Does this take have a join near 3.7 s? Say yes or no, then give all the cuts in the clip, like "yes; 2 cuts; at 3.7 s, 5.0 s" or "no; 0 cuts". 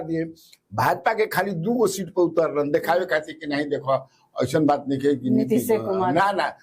no; 0 cuts